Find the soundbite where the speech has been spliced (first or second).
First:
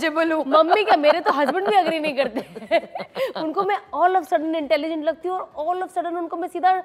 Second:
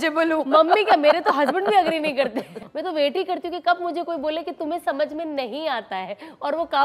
second